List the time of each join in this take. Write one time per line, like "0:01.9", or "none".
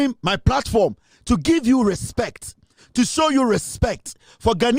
none